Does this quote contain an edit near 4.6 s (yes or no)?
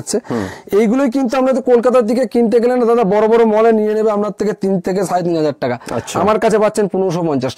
no